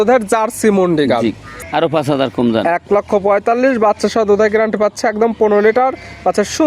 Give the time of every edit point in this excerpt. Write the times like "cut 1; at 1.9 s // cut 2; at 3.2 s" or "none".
cut 1; at 1.5 s